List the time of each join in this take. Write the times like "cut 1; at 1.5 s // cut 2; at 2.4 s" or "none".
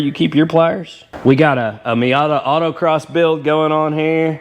cut 1; at 1.1 s